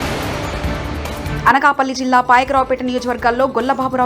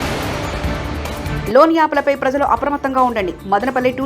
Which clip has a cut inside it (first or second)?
first